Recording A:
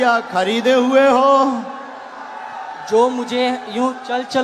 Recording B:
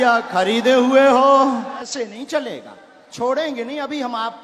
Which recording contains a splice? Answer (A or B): B